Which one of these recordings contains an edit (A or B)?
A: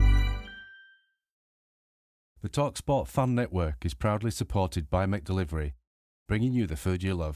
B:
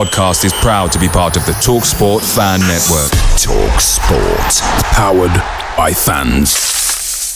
A